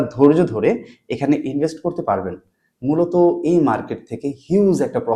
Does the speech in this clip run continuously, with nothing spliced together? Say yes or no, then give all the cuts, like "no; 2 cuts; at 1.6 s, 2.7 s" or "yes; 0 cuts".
yes; 0 cuts